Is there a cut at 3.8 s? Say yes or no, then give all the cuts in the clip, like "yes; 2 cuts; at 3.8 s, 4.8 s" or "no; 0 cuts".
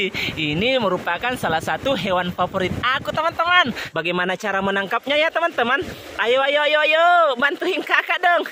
yes; 1 cut; at 3.8 s